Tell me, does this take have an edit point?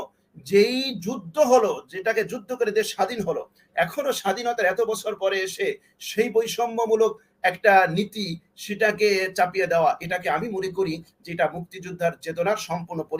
no; 0 cuts

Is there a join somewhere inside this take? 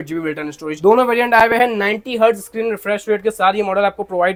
no; 0 cuts

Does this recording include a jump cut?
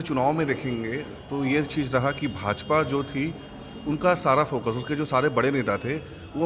no; 0 cuts

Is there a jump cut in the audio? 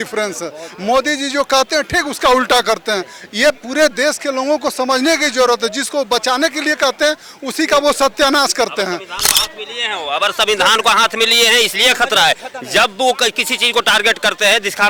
no; 0 cuts

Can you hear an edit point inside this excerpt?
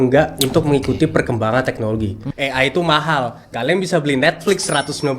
yes; 1 cut; at 2.2 s

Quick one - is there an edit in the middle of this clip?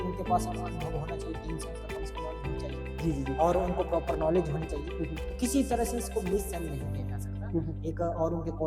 no; 0 cuts

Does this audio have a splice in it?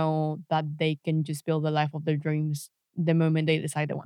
no; 0 cuts

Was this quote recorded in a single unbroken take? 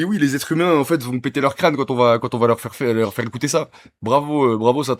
yes; 0 cuts

